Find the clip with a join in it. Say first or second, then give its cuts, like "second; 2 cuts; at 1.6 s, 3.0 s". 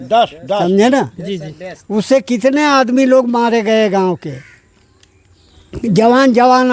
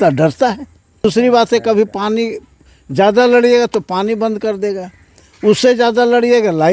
second; 1 cut; at 1.0 s